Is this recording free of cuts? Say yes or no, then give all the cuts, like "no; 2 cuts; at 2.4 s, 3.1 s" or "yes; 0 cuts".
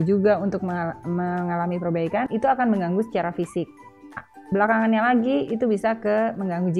no; 1 cut; at 2.3 s